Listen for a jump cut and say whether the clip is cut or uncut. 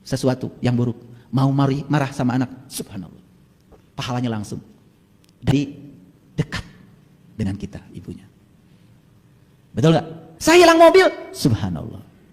cut